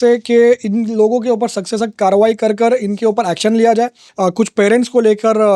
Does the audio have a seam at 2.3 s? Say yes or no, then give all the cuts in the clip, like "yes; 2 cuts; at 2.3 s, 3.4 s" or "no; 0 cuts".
no; 1 cut; at 4.0 s